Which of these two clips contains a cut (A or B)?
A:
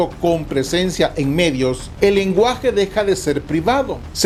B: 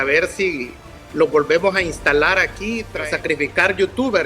B